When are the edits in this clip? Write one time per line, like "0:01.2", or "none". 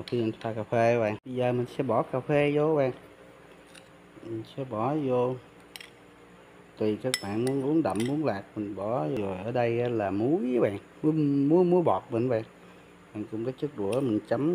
0:01.2
0:09.2